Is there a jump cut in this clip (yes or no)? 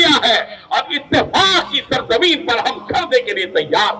no